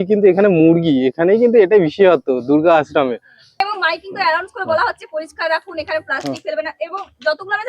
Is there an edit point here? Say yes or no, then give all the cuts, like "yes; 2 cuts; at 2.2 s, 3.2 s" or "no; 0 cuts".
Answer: yes; 1 cut; at 3.6 s